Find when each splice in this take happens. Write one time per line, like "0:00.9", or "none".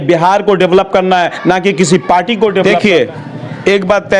0:02.6